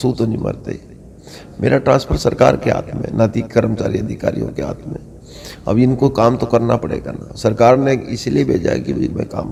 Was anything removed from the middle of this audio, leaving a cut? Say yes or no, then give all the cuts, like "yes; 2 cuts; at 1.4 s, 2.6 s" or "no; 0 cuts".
no; 0 cuts